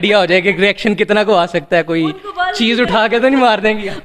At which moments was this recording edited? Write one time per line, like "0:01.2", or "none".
none